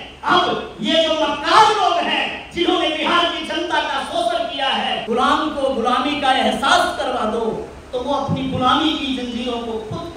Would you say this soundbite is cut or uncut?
cut